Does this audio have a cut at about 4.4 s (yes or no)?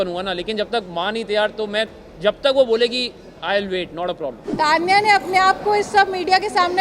yes